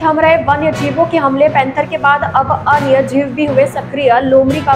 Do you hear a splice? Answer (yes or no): no